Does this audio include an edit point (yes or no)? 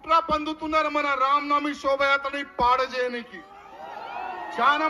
no